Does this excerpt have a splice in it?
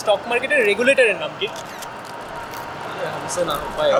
no; 0 cuts

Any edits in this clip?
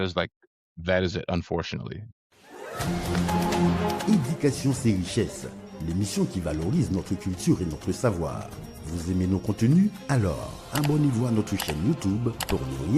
yes; 1 cut; at 2.1 s

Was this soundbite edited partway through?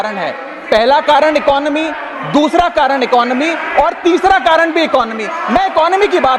no; 0 cuts

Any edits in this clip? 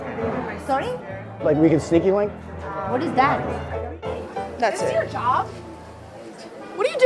yes; 1 cut; at 3.9 s

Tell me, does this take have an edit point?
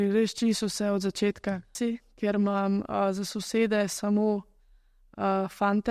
yes; 1 cut; at 1.7 s

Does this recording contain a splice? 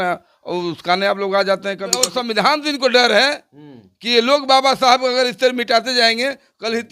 yes; 1 cut; at 2.1 s

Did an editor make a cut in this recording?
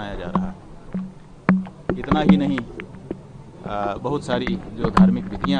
no; 0 cuts

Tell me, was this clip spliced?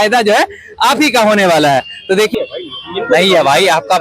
yes; 1 cut; at 2.3 s

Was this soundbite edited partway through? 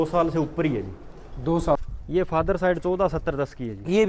yes; 1 cut; at 1.8 s

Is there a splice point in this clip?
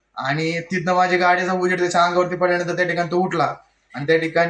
no; 0 cuts

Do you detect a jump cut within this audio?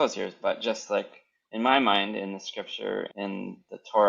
yes; 1 cut; at 3.1 s

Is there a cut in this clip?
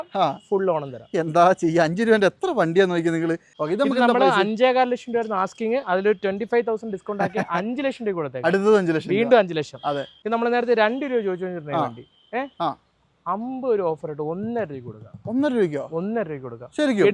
yes; 2 cuts; at 3.5 s, 10.2 s

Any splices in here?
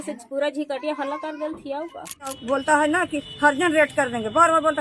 yes; 1 cut; at 2.4 s

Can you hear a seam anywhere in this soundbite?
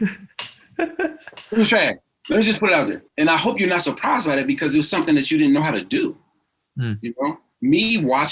yes; 2 cuts; at 2.1 s, 3.0 s

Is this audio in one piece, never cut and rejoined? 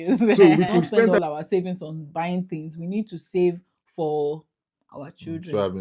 no; 1 cut; at 1.1 s

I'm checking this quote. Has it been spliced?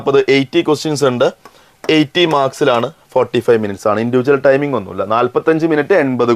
no; 0 cuts

